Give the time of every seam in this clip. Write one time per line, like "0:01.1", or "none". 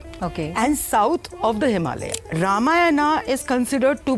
0:02.2